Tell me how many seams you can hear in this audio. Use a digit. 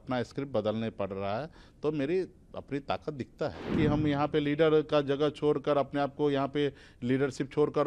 1